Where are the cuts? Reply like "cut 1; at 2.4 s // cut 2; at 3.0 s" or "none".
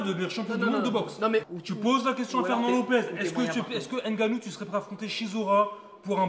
cut 1; at 1.4 s